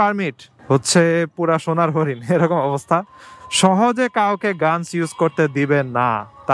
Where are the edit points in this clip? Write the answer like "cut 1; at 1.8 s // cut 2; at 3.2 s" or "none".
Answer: none